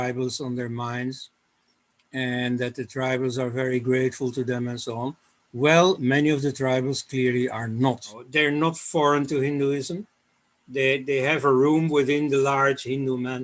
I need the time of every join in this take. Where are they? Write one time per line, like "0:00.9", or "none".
0:08.2